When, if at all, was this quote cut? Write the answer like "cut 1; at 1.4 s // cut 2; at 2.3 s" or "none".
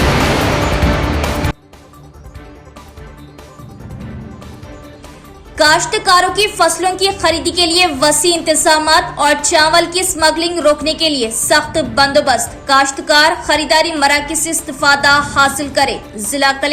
cut 1; at 1.5 s

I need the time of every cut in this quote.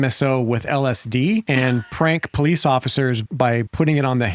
cut 1; at 1.5 s // cut 2; at 3.3 s

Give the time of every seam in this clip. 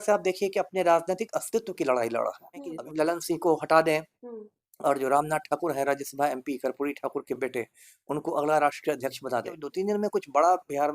cut 1; at 2.7 s // cut 2; at 9.6 s

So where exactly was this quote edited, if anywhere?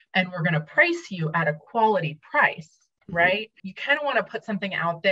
cut 1; at 3.7 s

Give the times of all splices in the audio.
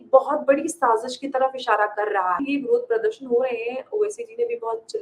cut 1; at 2.4 s

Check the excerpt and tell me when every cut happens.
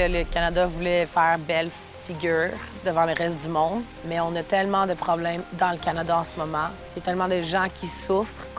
cut 1; at 4.0 s // cut 2; at 5.5 s // cut 3; at 6.8 s

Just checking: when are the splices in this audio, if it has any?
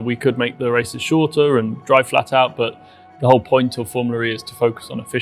none

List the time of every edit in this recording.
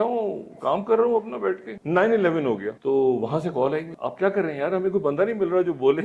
cut 1; at 1.7 s // cut 2; at 2.7 s // cut 3; at 4.0 s

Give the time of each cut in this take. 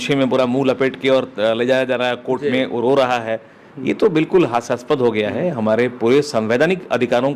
none

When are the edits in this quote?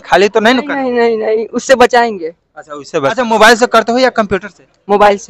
cut 1; at 3.2 s

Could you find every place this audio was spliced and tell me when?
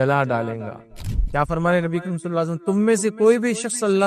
cut 1; at 1.0 s

